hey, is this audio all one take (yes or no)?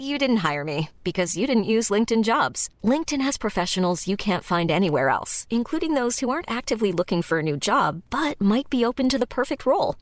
yes